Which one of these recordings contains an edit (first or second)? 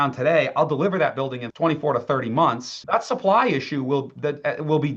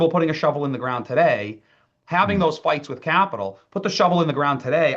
first